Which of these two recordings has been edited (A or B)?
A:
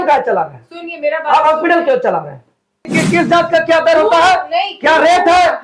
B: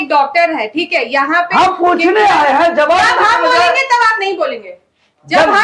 A